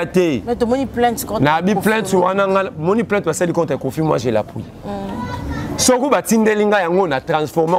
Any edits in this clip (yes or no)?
no